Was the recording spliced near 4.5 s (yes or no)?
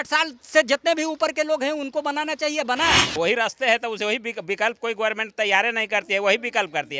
no